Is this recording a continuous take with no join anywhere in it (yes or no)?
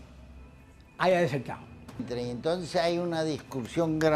no